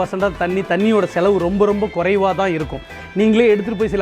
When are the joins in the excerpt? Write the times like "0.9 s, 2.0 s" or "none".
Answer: 3.0 s